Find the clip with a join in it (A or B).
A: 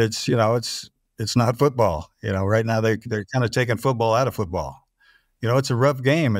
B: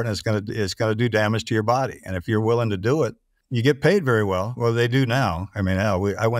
B